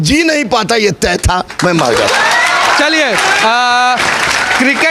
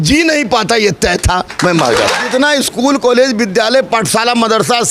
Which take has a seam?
second; 1 cut; at 2.2 s

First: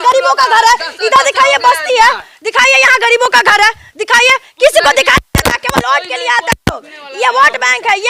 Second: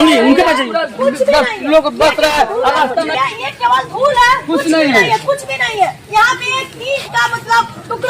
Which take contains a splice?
second; 1 cut; at 3.1 s

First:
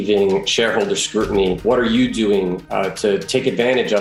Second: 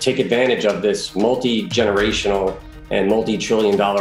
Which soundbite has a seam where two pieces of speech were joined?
first; 1 cut; at 1.6 s

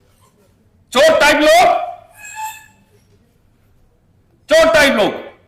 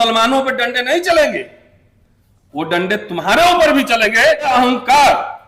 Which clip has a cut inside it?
second; 1 cut; at 4.5 s

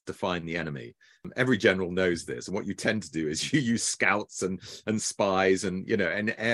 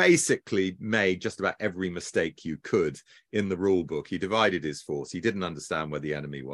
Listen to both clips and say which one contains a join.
first; 1 cut; at 1.3 s

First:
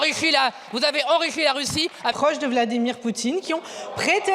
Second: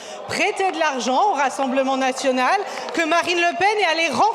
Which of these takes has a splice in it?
first; 1 cut; at 2.1 s

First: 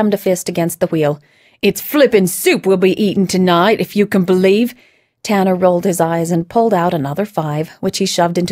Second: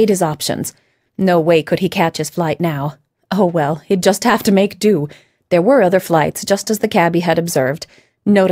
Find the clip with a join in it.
second; 1 cut; at 4.7 s

